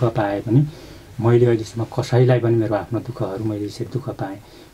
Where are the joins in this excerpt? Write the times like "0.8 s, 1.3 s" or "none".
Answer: none